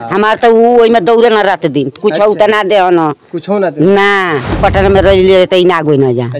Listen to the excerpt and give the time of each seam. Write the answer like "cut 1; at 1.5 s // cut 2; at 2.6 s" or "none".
cut 1; at 4.6 s